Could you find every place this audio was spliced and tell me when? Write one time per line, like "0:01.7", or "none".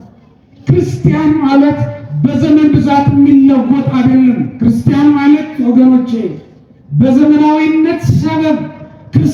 none